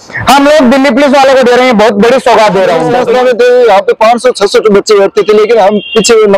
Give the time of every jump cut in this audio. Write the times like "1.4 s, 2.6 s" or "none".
2.9 s

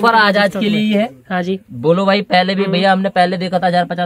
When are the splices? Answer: none

